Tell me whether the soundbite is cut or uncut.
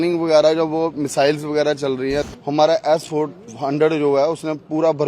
cut